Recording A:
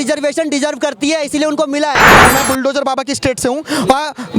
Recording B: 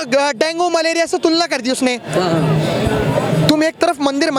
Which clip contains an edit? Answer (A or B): A